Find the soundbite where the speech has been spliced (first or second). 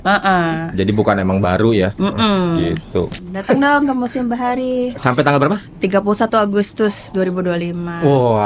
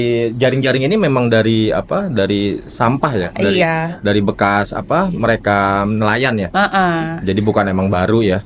first